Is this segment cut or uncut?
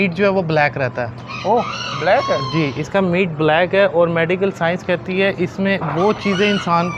uncut